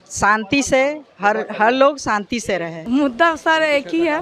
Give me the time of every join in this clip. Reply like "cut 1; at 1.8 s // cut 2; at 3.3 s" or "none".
cut 1; at 2.8 s